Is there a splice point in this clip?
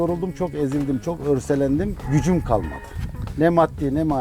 yes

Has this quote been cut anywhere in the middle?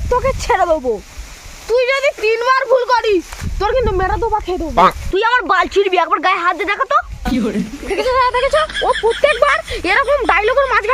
no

